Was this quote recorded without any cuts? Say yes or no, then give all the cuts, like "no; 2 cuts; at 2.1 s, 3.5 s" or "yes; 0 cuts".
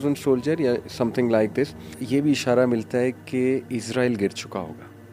no; 1 cut; at 2.0 s